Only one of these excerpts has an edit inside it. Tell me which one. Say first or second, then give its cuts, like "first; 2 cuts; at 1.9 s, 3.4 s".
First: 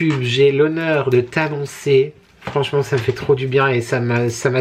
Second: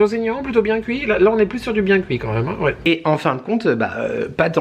second; 1 cut; at 2.8 s